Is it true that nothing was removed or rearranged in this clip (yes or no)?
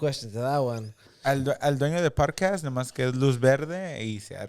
no